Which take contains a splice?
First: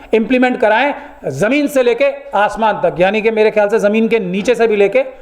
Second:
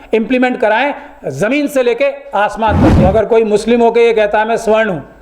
second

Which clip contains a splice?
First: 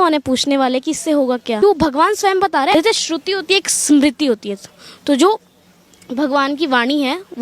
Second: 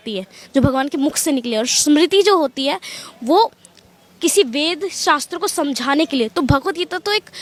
first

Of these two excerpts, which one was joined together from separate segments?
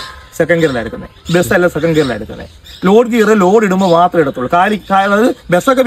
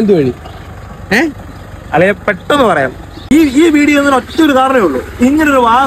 second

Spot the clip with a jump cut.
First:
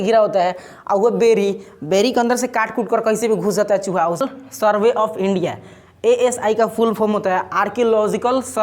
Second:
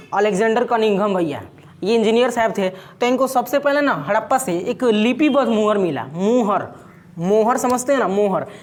first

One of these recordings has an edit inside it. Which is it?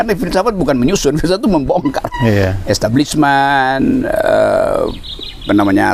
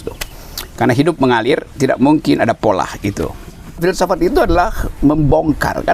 second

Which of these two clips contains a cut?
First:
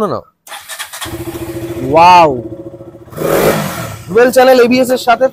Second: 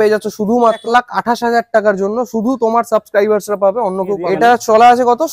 second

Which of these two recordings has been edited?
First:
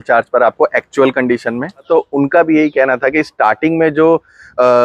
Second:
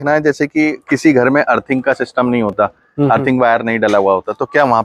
first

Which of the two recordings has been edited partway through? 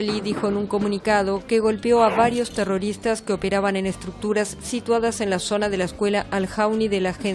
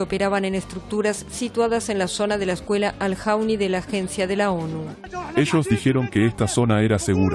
second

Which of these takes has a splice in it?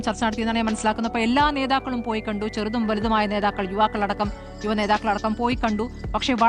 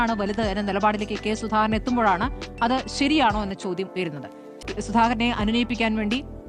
second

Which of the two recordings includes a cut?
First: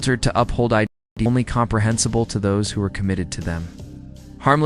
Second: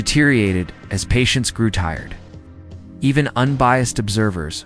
first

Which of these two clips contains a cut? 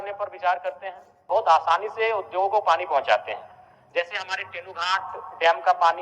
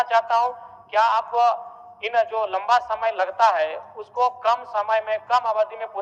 first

